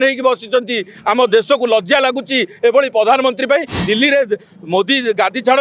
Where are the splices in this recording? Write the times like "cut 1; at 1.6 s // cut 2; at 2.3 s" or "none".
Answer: cut 1; at 3.8 s